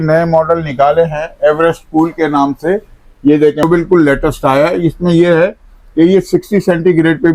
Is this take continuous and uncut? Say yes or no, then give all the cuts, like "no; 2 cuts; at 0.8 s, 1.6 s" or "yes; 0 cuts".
no; 1 cut; at 3.6 s